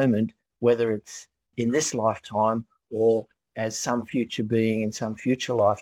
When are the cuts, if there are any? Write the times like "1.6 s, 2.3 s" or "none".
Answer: 1.5 s, 3.4 s